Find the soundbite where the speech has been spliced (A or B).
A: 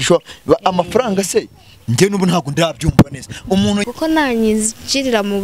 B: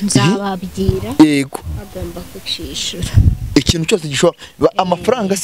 A